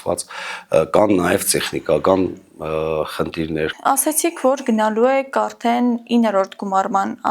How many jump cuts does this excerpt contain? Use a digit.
1